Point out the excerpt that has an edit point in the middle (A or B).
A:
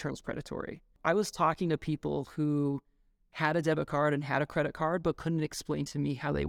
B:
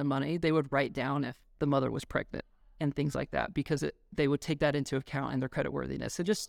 A